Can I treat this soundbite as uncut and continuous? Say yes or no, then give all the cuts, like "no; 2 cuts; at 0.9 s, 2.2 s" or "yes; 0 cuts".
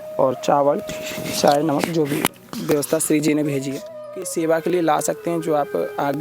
no; 1 cut; at 4.2 s